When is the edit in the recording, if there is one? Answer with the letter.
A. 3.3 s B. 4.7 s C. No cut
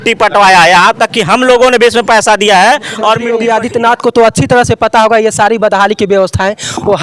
A